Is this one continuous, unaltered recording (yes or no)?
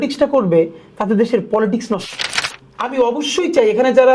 no